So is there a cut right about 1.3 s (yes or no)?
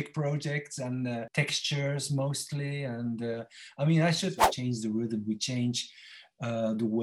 yes